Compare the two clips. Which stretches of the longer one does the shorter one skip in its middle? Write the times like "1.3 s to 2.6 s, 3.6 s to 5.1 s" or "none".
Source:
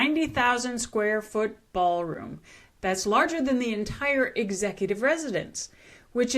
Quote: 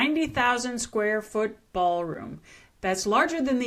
none

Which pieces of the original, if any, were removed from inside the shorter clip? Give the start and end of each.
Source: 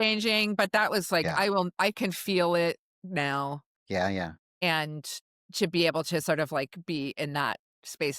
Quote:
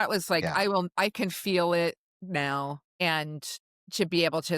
3.7 s to 4.5 s

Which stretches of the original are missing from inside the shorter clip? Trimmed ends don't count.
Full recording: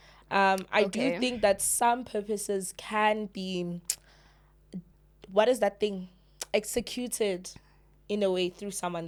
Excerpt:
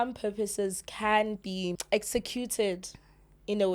3.7 s to 6.4 s

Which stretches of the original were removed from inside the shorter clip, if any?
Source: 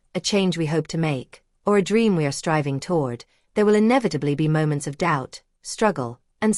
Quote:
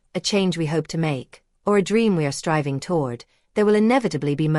none

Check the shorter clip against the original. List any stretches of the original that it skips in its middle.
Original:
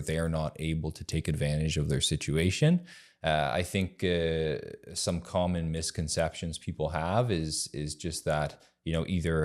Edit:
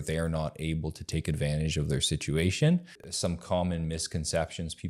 3.0 s to 4.8 s

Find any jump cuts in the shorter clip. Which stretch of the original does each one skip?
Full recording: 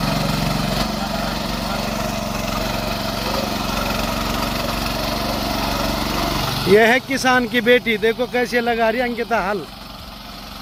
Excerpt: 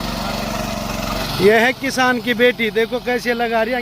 2.7 s to 6.5 s

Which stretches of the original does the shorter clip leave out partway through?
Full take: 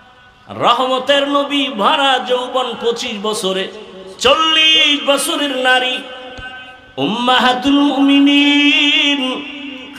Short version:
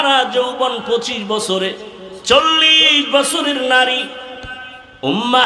none

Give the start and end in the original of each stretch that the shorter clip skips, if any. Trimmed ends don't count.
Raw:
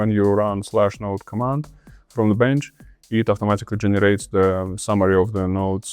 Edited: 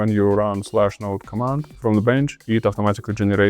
1.7 s to 2.0 s, 2.7 s to 3.0 s

